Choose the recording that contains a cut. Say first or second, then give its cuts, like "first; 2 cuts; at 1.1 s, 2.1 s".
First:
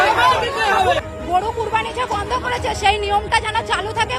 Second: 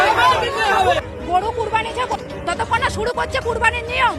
second; 1 cut; at 2.2 s